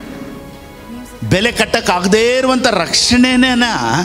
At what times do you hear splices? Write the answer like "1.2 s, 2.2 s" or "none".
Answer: 1.0 s